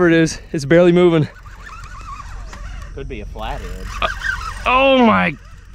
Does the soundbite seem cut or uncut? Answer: uncut